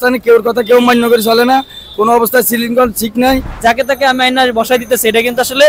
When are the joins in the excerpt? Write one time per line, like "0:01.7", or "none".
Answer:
0:03.5

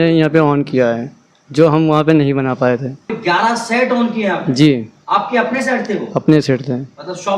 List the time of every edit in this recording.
0:03.1

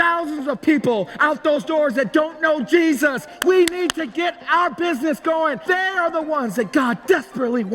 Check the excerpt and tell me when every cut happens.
0:05.6

